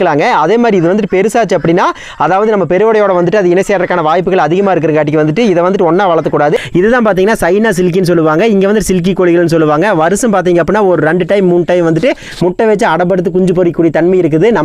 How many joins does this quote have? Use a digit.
1